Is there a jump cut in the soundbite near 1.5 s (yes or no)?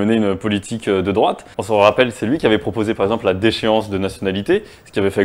yes